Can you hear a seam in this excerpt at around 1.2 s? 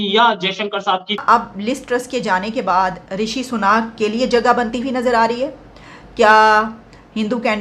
yes; 1 cut; at 1.2 s

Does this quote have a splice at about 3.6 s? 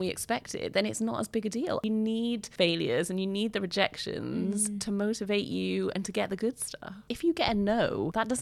no; 2 cuts; at 1.8 s, 7.1 s

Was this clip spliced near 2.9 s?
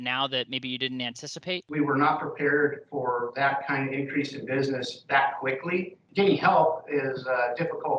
no; 2 cuts; at 1.6 s, 6.0 s

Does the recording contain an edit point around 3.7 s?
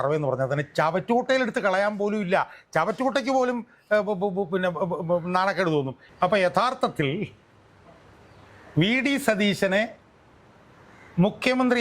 no; 1 cut; at 6.0 s

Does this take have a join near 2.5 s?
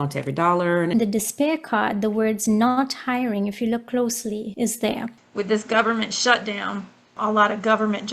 no; 4 cuts; at 0.9 s, 4.5 s, 5.2 s, 7.1 s

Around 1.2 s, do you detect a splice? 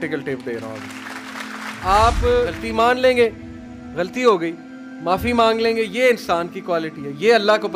no; 1 cut; at 2.6 s

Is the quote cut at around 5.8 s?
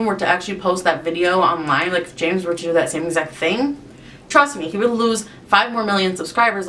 no; 0 cuts

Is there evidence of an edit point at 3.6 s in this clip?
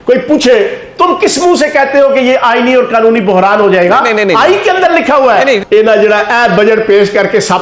no; 1 cut; at 5.6 s

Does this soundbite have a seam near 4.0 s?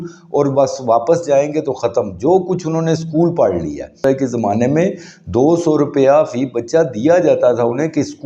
yes; 1 cut; at 4.0 s

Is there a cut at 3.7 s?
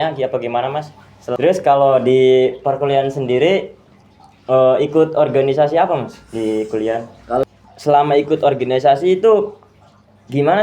no; 2 cuts; at 1.4 s, 7.4 s

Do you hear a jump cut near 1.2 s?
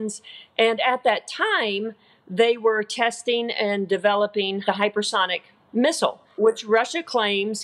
no; 2 cuts; at 4.6 s, 6.2 s

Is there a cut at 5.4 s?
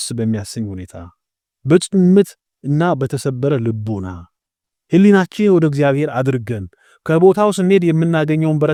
no; 0 cuts

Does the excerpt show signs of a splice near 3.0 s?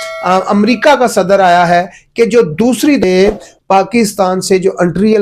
yes; 1 cut; at 3.0 s

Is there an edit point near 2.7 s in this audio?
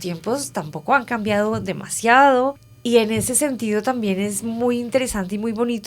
yes; 1 cut; at 2.7 s

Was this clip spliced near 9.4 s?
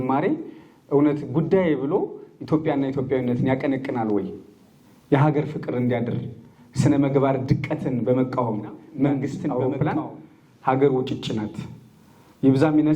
yes; 1 cut; at 9.4 s

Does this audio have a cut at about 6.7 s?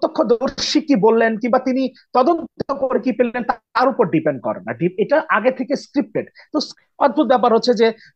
yes; 1 cut; at 6.7 s

